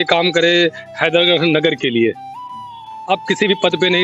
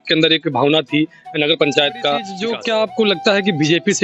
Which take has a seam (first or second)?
second